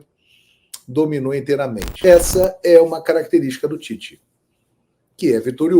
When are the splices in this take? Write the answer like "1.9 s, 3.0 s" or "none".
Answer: 1.9 s